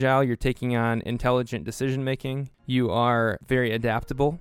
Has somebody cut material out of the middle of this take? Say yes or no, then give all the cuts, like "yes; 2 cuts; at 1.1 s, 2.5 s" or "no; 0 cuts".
yes; 2 cuts; at 2.5 s, 3.4 s